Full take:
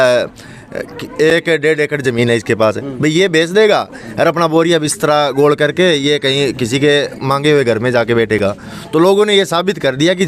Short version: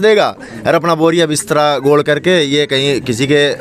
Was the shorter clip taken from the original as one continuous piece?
yes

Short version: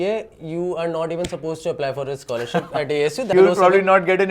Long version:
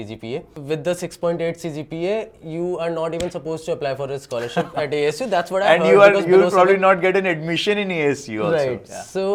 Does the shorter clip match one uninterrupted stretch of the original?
no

